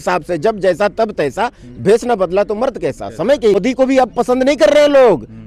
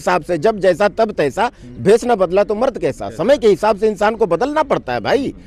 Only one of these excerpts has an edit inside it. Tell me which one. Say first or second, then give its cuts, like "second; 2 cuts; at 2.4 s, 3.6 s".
first; 1 cut; at 3.6 s